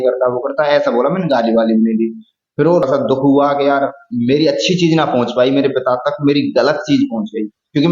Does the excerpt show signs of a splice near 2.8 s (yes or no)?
yes